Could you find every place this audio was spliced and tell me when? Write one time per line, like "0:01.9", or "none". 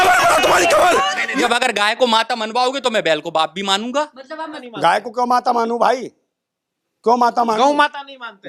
0:01.4
0:04.5